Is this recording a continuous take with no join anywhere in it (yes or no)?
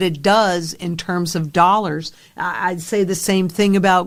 yes